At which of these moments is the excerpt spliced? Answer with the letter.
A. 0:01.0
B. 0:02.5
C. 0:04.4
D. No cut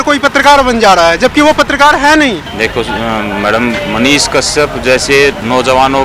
B